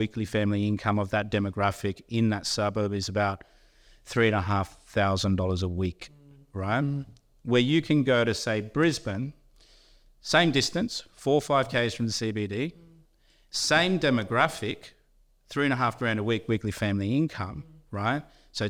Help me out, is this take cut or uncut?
uncut